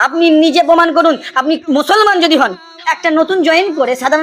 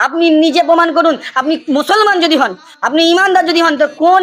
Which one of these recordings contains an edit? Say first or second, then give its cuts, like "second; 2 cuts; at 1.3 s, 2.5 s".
first; 1 cut; at 2.9 s